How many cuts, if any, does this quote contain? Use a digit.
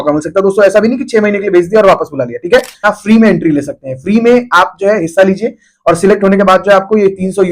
1